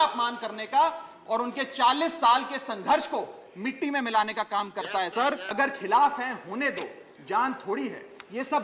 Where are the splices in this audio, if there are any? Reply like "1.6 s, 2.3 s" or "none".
5.5 s